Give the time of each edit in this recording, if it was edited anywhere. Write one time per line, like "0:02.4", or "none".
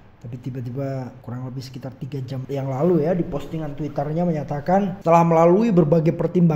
0:01.2
0:02.4
0:05.0